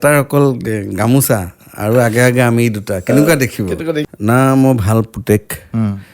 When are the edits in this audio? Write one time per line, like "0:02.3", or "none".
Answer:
0:04.1